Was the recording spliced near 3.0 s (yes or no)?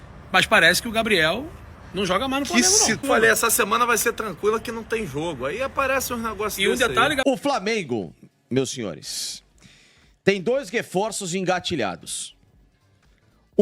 yes